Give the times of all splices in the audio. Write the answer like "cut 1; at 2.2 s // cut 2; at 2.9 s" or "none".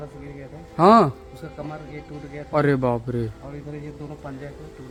none

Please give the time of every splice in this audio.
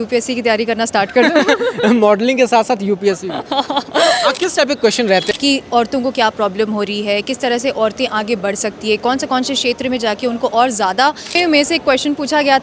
cut 1; at 5.3 s // cut 2; at 11.4 s

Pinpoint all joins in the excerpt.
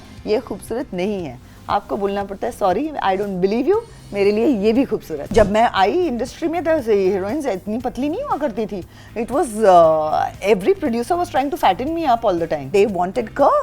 cut 1; at 5.3 s // cut 2; at 12.7 s

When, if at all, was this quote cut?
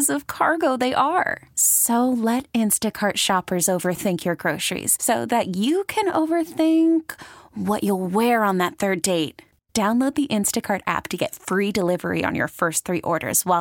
none

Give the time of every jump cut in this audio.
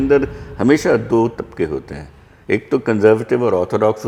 none

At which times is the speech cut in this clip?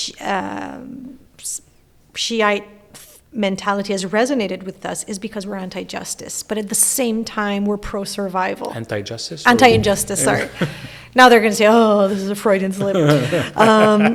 none

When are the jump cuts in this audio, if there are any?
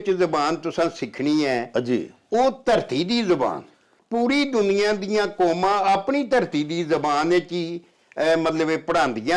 cut 1; at 3.9 s

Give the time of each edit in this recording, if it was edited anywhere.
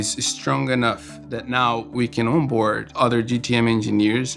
cut 1; at 2.8 s

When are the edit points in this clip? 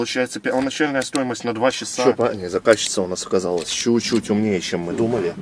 cut 1; at 2.0 s

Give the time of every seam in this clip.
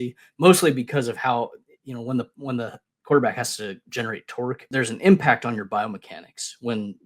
cut 1; at 4.6 s

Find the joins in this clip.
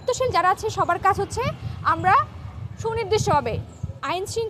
none

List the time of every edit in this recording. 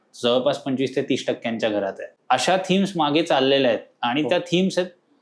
cut 1; at 2.1 s

